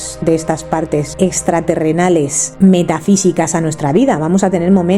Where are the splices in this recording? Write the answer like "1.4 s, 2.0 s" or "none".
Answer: 1.1 s, 2.4 s